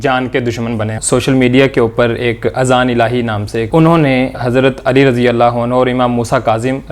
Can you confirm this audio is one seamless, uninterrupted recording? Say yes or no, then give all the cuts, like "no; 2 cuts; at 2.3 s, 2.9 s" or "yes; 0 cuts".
no; 3 cuts; at 1.0 s, 3.7 s, 4.4 s